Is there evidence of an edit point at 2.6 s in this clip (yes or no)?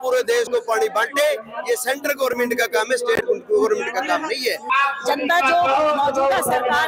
no